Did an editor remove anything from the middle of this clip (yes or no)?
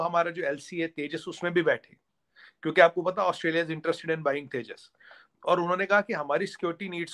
no